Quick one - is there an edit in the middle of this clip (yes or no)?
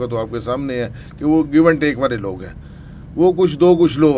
no